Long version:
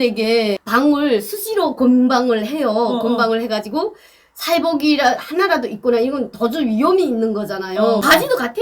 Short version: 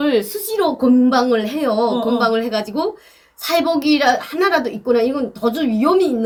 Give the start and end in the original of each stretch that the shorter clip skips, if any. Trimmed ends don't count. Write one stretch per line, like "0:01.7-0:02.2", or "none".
none